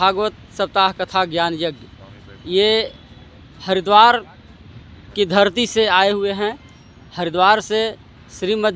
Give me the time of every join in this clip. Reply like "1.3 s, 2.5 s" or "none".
none